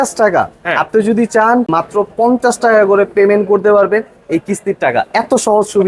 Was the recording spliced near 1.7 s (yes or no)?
yes